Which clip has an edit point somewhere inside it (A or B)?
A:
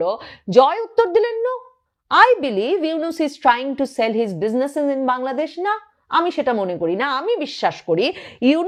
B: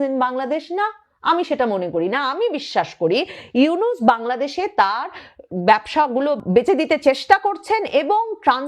B